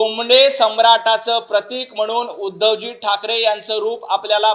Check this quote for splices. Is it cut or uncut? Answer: uncut